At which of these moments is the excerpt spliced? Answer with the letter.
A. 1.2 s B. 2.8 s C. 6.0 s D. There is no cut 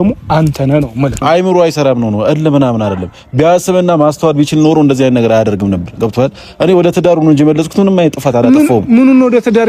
A